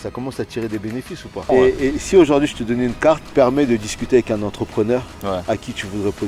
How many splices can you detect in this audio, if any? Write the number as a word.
two